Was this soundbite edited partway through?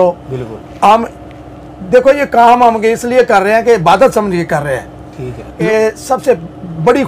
yes; 1 cut; at 5.6 s

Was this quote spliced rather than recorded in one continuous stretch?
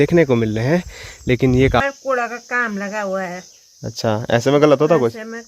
yes; 1 cut; at 1.8 s

